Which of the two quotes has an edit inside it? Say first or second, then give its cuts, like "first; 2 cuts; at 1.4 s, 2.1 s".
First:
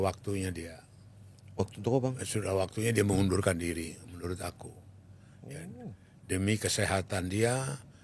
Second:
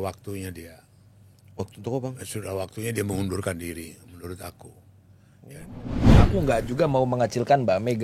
second; 1 cut; at 6.2 s